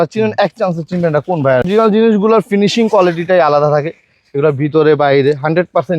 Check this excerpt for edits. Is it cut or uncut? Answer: cut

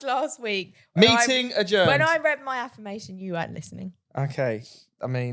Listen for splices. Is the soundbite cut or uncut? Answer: uncut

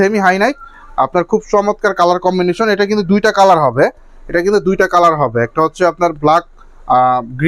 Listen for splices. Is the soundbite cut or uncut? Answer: uncut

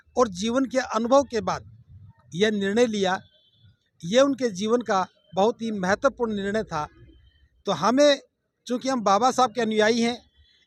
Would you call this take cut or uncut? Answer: uncut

